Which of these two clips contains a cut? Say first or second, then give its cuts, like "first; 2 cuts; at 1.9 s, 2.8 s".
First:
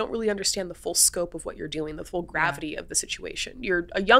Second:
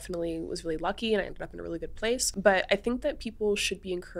second; 1 cut; at 2.3 s